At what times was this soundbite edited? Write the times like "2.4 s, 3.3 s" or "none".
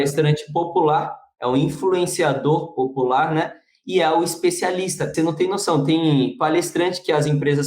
5.1 s